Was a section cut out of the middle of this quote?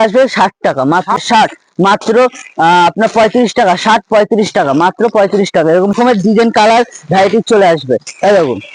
yes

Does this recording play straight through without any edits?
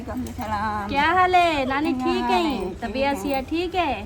yes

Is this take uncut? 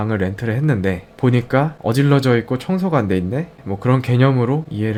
yes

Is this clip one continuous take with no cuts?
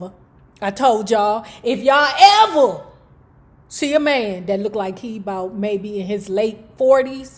yes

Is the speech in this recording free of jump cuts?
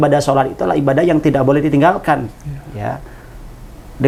yes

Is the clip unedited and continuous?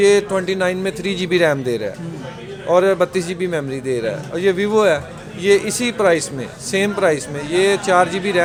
yes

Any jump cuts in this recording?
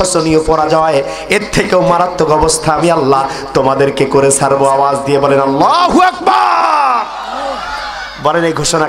no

